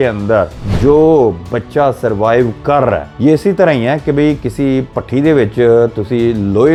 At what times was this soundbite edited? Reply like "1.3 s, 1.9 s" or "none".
none